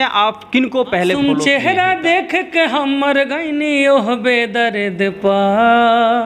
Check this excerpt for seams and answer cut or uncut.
cut